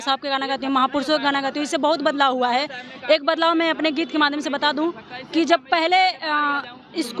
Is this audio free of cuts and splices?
yes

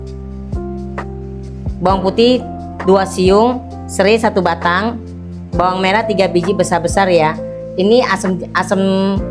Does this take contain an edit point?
yes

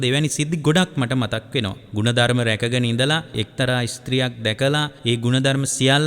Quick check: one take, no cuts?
no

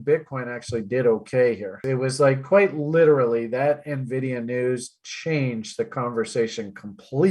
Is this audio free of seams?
no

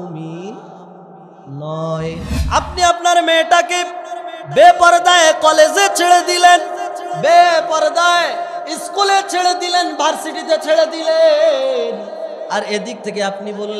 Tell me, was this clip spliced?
yes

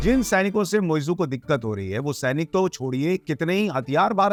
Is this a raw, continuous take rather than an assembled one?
yes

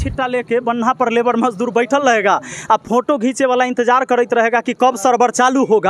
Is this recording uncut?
yes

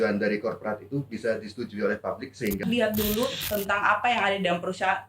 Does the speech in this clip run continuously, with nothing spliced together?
no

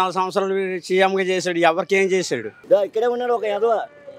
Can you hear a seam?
yes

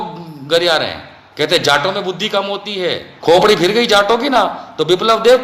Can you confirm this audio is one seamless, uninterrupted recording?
no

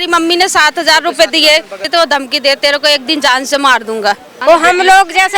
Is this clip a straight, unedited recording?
no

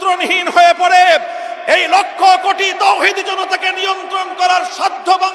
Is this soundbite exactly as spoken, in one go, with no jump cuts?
yes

